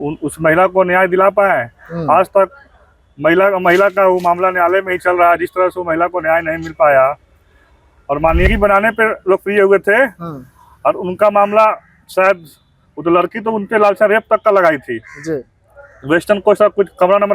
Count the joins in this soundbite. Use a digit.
1